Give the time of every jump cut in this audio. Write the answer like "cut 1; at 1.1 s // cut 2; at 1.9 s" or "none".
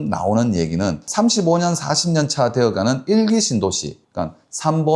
cut 1; at 1.0 s